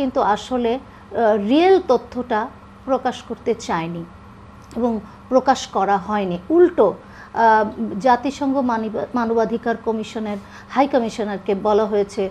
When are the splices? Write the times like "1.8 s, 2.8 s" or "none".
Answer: none